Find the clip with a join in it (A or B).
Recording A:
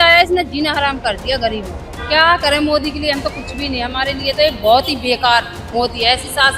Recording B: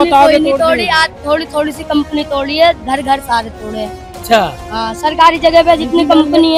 A